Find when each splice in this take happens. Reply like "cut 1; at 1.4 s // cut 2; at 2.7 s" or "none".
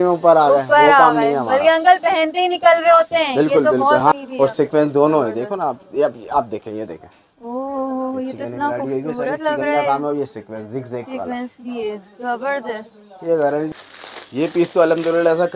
cut 1; at 4.0 s // cut 2; at 13.7 s